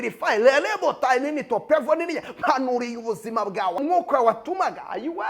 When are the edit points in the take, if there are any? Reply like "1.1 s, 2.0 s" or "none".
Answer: 3.8 s